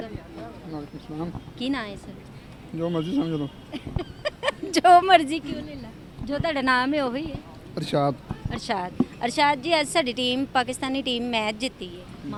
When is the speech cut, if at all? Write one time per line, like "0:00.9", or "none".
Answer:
none